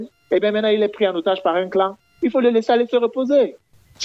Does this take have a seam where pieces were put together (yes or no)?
no